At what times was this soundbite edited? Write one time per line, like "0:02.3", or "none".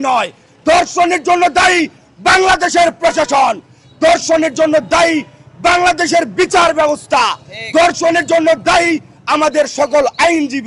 none